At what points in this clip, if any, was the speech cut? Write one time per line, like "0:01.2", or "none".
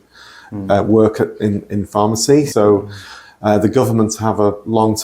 0:02.5